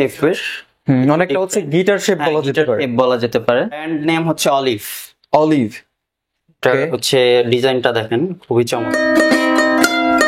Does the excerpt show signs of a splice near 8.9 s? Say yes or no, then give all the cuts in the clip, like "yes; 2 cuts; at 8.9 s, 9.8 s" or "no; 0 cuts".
yes; 2 cuts; at 3.9 s, 8.9 s